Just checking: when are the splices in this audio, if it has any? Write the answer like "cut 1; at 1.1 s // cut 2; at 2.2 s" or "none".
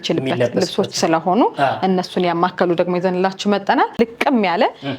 cut 1; at 3.9 s

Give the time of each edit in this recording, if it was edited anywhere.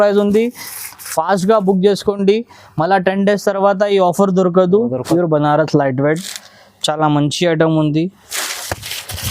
cut 1; at 5.0 s

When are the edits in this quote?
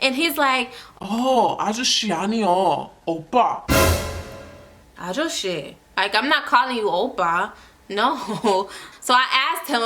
cut 1; at 8.8 s

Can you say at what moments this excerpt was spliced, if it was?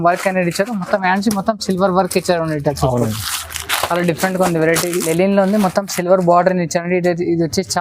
cut 1; at 5.1 s

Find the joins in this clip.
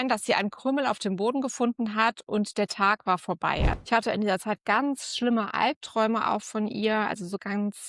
cut 1; at 3.8 s

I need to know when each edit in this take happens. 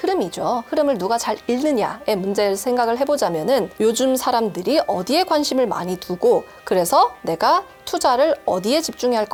none

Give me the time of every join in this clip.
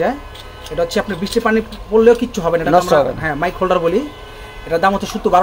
none

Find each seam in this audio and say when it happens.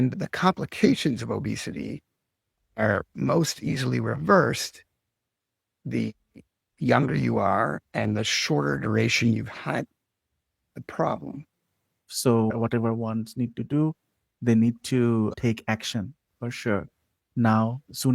cut 1; at 12.1 s

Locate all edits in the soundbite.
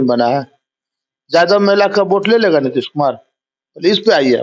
none

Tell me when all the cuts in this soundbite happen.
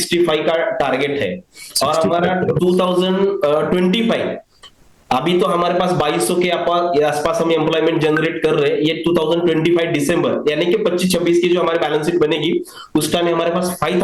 none

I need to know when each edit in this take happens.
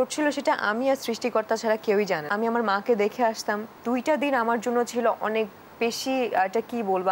cut 1; at 2.3 s // cut 2; at 3.7 s

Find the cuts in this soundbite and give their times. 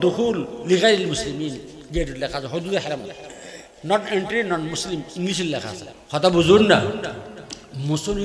cut 1; at 5.8 s

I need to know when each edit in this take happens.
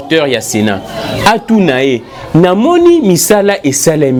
none

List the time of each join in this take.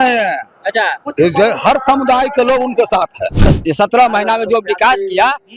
cut 1; at 3.4 s

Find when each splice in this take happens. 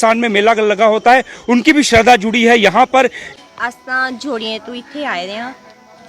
cut 1; at 3.2 s

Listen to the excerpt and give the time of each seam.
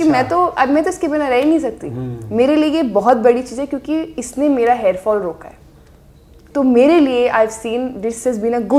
none

